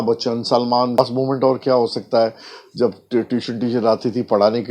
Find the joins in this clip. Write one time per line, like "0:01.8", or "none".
0:01.0